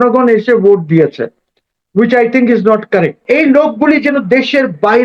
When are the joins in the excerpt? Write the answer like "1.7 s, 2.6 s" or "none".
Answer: 3.2 s